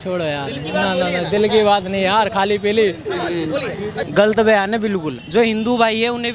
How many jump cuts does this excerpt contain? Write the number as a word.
two